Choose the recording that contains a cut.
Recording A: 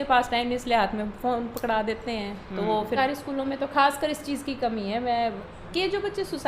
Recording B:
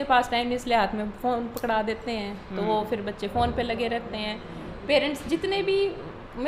A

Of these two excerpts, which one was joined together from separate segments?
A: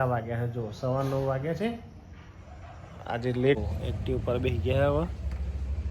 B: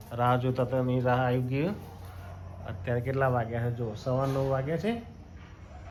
A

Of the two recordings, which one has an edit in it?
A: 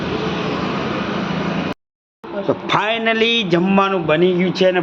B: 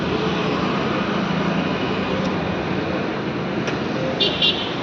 A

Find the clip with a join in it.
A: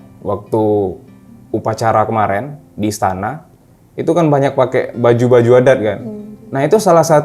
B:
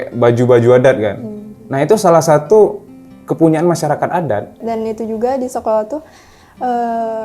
B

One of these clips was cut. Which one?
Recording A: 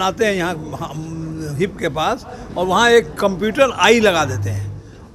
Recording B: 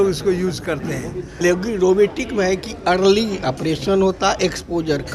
B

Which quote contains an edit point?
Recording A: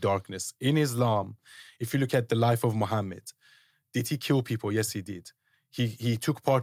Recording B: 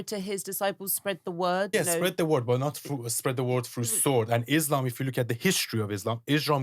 B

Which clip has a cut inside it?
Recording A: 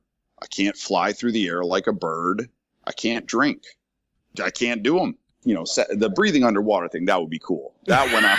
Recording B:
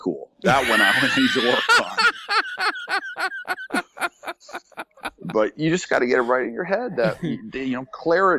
A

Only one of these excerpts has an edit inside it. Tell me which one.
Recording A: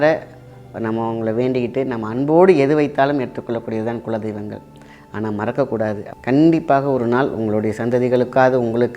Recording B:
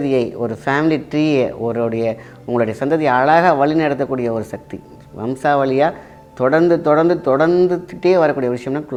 A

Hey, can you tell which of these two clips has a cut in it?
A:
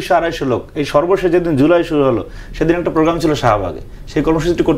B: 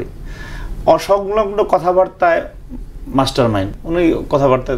B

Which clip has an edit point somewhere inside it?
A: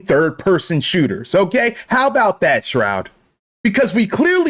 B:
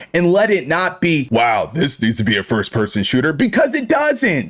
A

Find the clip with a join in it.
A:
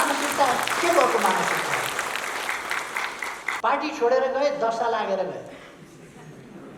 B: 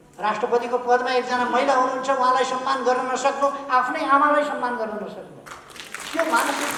A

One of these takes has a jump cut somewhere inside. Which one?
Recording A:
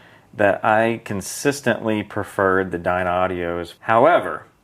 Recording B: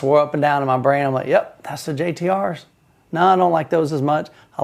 A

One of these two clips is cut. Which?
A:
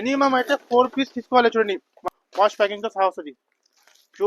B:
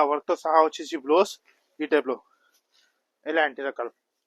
A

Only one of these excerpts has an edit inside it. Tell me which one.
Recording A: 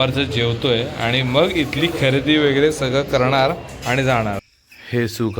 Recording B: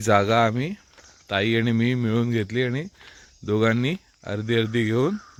A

